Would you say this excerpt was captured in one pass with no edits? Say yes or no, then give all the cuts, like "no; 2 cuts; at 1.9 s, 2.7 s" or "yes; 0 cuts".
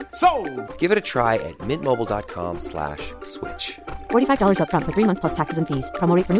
yes; 0 cuts